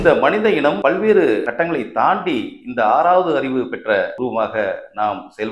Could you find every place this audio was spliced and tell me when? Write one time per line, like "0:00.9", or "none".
0:00.8
0:01.5
0:04.1